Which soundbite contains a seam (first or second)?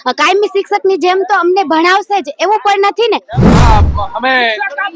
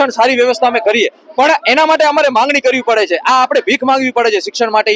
first